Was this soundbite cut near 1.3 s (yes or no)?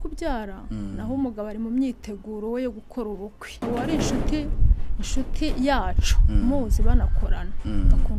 no